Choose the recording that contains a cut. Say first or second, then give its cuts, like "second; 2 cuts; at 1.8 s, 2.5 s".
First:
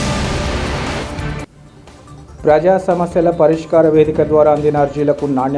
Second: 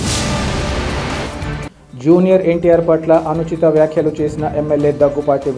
first; 1 cut; at 1.0 s